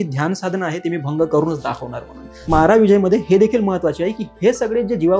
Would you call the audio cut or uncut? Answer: cut